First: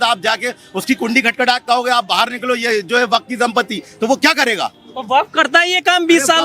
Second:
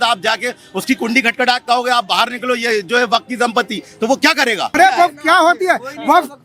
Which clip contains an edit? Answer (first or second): second